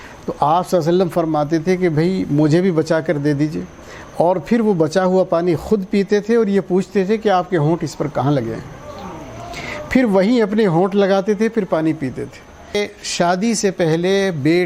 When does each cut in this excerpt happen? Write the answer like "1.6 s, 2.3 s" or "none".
12.8 s